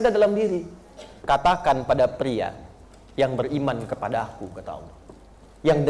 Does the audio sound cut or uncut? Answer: cut